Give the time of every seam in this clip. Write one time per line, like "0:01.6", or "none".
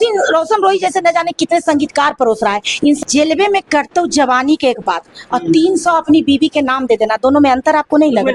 0:03.0